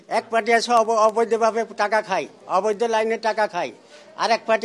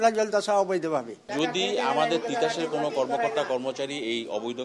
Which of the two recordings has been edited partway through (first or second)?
second